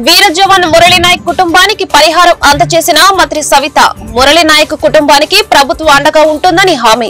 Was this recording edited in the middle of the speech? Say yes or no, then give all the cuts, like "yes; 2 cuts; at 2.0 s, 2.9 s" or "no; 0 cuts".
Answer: no; 0 cuts